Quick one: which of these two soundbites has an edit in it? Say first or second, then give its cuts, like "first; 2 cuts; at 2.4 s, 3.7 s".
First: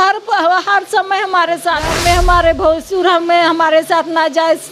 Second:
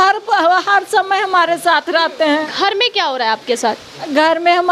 first; 1 cut; at 1.9 s